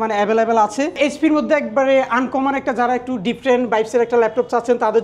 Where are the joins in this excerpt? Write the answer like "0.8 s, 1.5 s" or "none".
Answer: 1.0 s